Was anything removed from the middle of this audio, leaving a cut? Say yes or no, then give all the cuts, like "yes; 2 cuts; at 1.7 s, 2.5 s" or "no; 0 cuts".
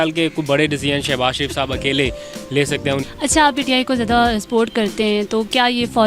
yes; 1 cut; at 3.1 s